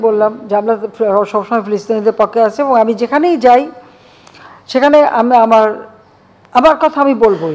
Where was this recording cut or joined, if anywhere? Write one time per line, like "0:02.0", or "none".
none